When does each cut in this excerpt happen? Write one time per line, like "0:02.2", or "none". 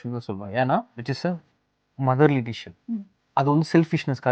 0:01.0